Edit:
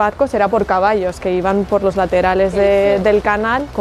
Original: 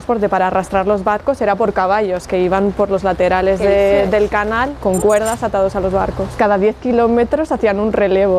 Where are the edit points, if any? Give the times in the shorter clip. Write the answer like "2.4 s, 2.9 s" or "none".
none

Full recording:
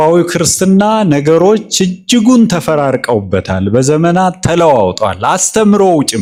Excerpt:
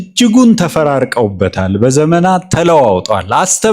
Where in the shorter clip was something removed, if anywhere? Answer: none

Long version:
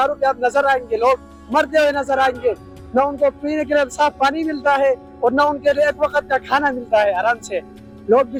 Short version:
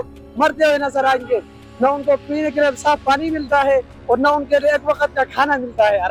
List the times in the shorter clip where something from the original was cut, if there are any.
none

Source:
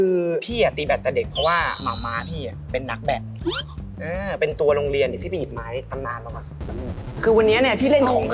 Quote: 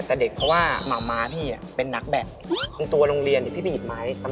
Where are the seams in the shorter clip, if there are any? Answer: 2.8 s

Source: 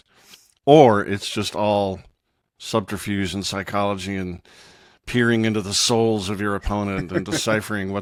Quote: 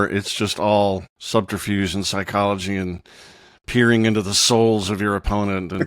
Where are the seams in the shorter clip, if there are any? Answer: 1.1 s

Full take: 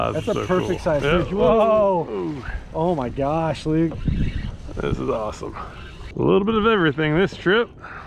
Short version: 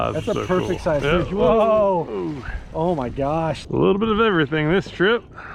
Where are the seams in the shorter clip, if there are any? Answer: 3.6 s

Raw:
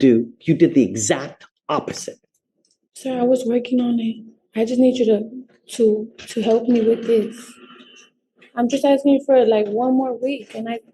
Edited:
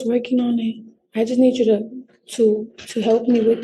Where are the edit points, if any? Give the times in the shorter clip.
none

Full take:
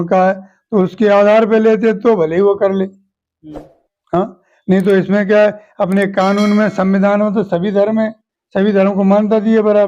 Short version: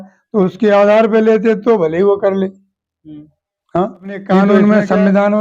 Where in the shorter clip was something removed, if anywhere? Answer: 4.5 s

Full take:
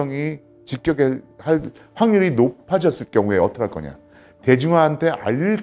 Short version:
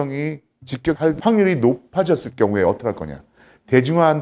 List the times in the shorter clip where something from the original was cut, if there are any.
1.0 s

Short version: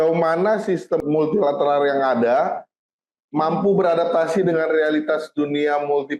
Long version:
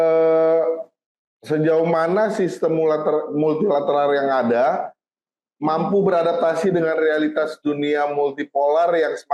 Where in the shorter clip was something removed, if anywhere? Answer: 1.0 s

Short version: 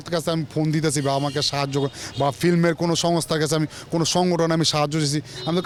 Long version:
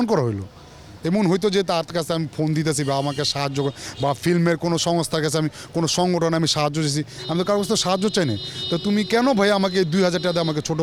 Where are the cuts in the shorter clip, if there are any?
none

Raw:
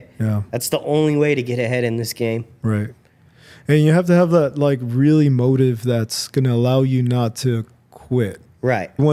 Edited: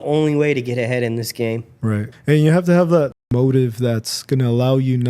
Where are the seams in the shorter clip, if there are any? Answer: 2.1 s, 3.2 s

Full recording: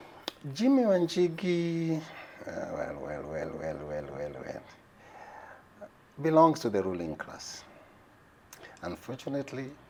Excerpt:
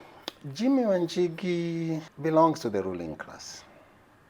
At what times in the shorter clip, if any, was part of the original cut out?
2.1 s

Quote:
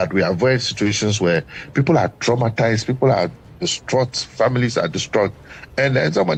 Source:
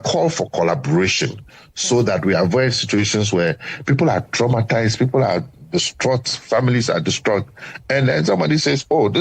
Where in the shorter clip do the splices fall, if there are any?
none

